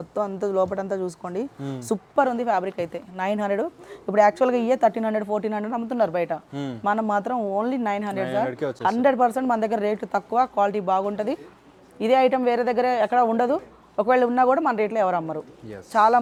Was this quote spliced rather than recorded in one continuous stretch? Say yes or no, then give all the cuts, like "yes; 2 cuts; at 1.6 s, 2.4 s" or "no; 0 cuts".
no; 0 cuts